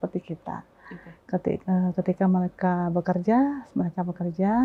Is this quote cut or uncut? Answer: uncut